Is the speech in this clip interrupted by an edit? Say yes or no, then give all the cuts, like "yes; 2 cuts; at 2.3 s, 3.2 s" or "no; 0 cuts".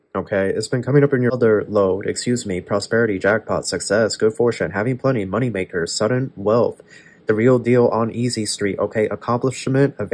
yes; 1 cut; at 1.4 s